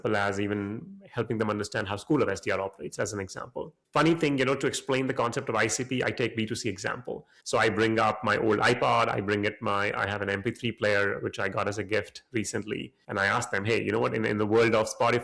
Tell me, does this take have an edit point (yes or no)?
no